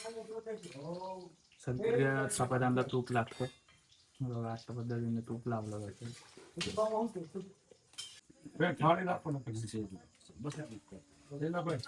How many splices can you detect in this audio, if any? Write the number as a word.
one